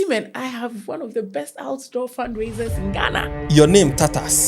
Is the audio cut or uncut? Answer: cut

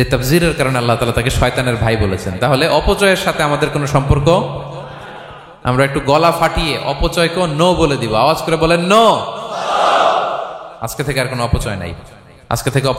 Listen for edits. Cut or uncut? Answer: uncut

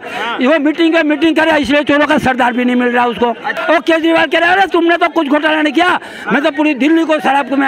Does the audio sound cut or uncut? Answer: cut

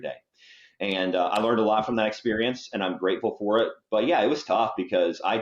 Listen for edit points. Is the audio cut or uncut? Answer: uncut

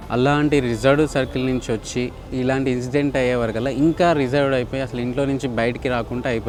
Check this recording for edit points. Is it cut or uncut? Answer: uncut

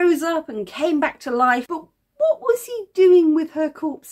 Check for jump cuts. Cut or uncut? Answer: cut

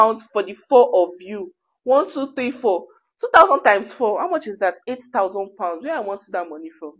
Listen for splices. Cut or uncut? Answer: uncut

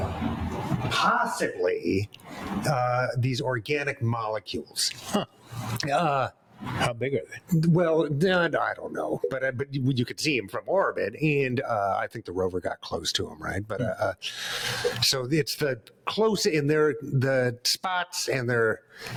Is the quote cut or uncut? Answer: uncut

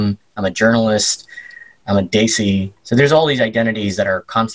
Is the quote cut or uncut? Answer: cut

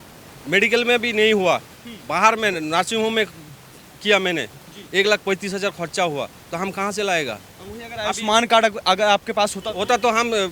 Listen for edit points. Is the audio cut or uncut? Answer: uncut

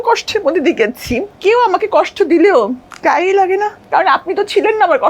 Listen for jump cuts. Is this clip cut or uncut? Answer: cut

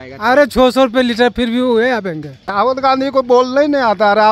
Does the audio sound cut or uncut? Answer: cut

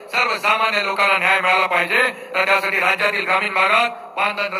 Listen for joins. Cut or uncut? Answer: uncut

